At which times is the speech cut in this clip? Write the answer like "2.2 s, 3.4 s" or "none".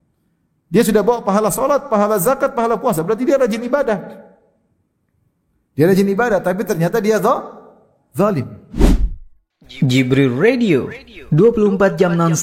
8.6 s